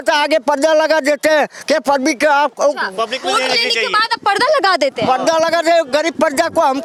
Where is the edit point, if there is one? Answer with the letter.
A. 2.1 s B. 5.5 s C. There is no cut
C